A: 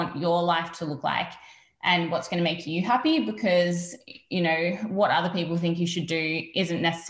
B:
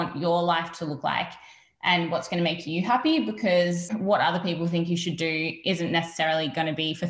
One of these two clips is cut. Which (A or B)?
B